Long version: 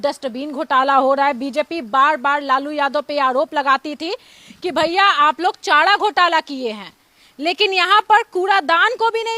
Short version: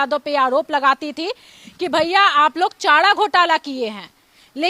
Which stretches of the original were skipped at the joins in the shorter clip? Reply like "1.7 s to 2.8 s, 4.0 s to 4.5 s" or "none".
none

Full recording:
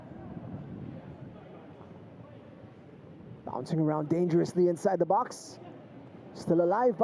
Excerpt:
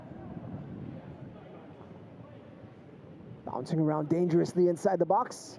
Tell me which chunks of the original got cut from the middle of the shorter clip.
none

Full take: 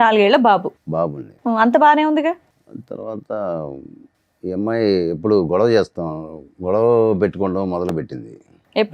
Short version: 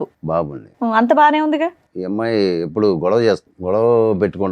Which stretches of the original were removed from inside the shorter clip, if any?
2.5 s to 4.4 s, 6.0 s to 6.5 s

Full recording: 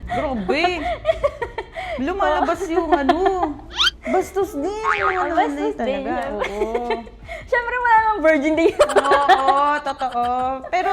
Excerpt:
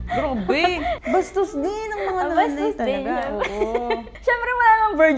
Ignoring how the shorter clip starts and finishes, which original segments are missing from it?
1.0 s to 4.0 s, 7.1 s to 7.4 s

